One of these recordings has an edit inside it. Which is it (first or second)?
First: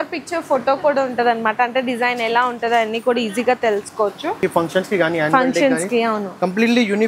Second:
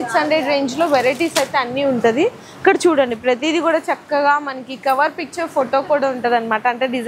first